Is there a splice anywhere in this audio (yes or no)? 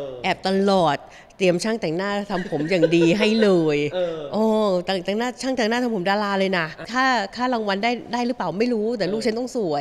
yes